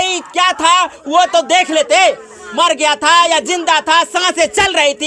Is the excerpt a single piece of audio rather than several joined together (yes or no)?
yes